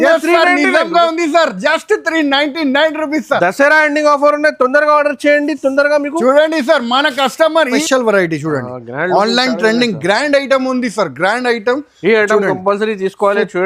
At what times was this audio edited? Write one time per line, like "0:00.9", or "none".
0:07.7